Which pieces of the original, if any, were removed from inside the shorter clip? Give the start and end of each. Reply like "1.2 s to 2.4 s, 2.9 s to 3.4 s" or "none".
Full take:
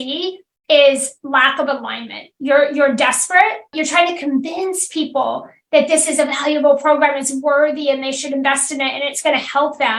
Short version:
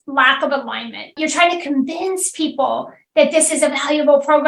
2.2 s to 3.6 s